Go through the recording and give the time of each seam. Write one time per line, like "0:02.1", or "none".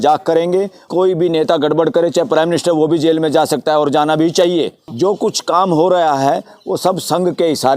0:00.9
0:04.8